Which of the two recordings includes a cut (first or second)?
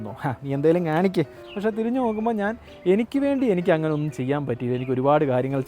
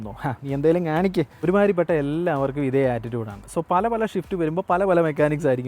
first